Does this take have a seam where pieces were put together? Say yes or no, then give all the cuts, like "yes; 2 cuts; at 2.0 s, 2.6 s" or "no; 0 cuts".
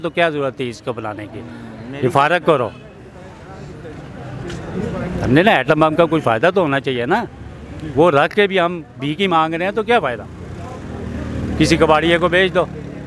no; 0 cuts